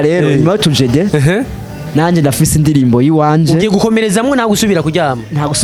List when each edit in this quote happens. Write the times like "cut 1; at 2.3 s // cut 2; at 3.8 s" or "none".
none